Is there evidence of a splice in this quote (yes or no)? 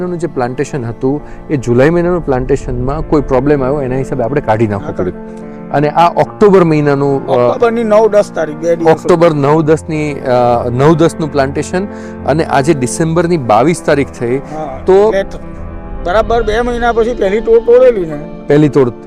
no